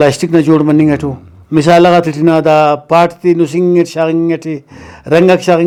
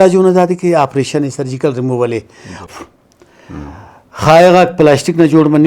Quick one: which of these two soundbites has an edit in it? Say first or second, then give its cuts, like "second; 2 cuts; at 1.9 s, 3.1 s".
second; 1 cut; at 2.6 s